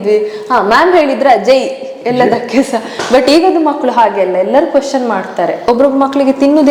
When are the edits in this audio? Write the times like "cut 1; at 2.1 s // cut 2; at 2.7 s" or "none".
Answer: cut 1; at 5.6 s